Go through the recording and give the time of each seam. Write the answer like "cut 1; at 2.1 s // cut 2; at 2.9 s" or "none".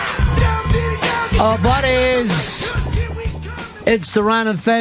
cut 1; at 3.8 s